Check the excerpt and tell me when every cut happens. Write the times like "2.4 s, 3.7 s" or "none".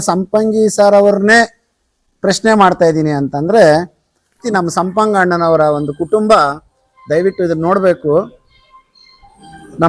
4.4 s